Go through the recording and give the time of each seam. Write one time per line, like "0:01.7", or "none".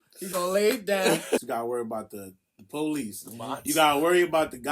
0:01.4

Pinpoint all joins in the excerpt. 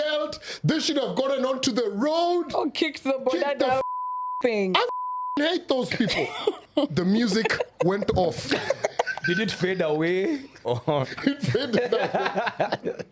0:06.6

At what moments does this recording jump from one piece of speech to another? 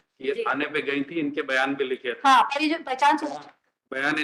none

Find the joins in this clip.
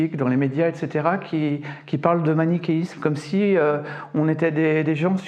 none

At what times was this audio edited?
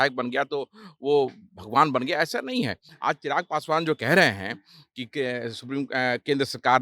0:02.8

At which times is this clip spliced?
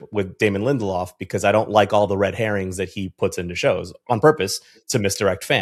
none

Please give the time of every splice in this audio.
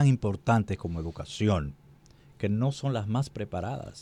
none

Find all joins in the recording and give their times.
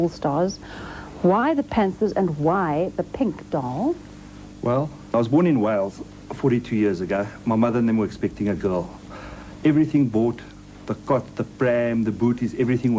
none

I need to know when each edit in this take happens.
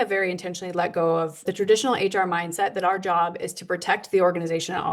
0:01.5

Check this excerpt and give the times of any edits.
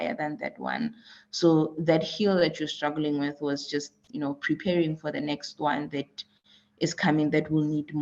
none

